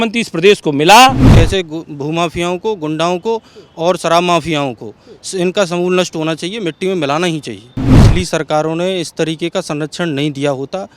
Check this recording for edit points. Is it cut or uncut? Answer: cut